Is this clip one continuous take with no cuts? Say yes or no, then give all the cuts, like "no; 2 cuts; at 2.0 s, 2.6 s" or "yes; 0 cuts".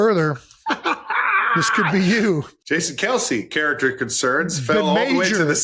no; 1 cut; at 2.5 s